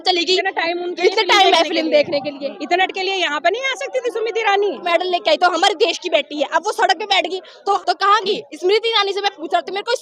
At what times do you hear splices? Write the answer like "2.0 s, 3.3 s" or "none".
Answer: 2.8 s, 4.8 s, 7.8 s